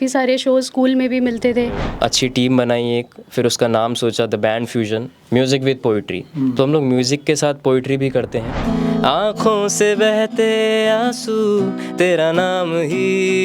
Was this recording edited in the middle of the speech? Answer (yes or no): yes